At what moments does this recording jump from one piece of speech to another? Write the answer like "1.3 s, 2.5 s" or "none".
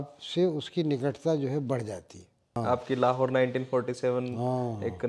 2.5 s